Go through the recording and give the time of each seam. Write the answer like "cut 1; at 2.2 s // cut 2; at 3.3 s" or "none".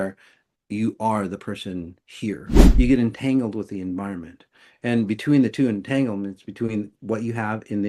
cut 1; at 2.6 s